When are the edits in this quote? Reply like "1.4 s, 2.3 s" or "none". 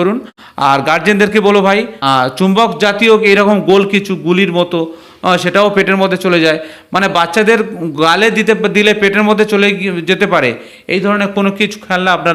2.0 s